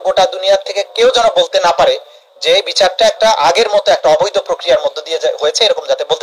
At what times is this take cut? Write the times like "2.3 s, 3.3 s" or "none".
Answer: none